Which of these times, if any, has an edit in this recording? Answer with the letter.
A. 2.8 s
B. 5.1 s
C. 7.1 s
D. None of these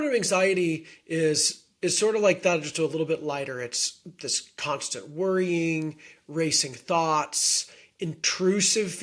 D